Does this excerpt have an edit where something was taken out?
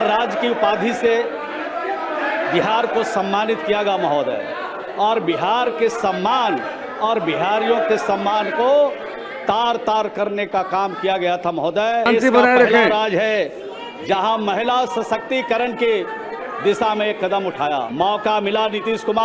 yes; 2 cuts; at 12.1 s, 17.9 s

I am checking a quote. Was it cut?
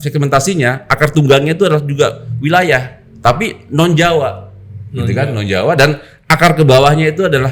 no; 0 cuts

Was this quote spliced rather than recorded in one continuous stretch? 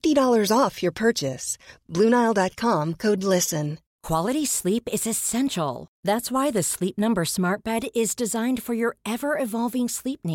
yes; 1 cut; at 3.9 s

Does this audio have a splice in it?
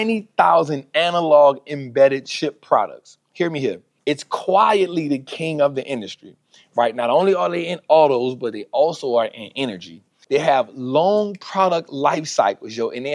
yes; 2 cuts; at 3.9 s, 10.1 s

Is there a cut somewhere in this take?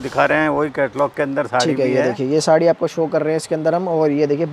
no; 0 cuts

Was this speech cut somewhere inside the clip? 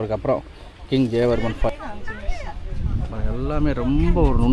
yes; 1 cut; at 1.7 s

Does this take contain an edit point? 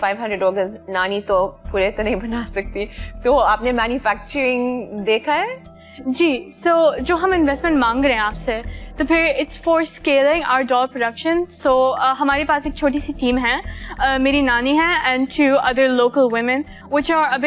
no; 0 cuts

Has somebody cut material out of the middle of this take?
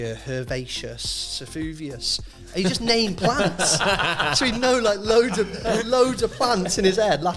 no; 0 cuts

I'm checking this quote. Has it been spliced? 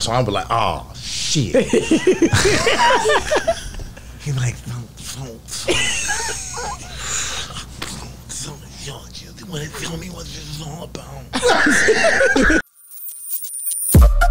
yes; 1 cut; at 12.6 s

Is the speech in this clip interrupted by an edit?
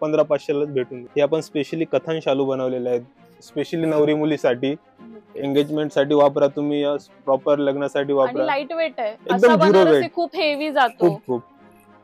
yes; 1 cut; at 1.0 s

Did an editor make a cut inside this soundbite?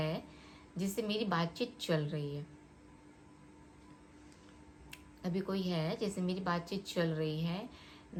no; 0 cuts

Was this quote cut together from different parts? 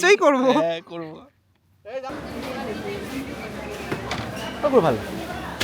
yes; 1 cut; at 2.1 s

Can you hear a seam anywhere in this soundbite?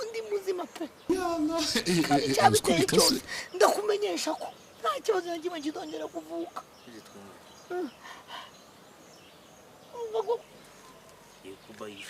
yes; 1 cut; at 10.4 s

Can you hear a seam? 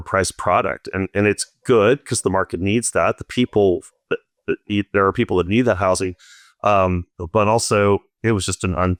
no; 0 cuts

